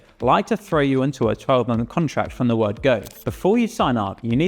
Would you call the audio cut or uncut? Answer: cut